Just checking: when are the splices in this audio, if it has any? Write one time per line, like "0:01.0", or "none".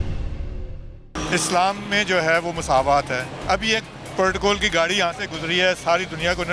0:01.2
0:03.3